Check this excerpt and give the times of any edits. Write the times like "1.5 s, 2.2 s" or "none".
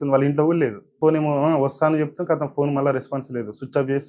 0.9 s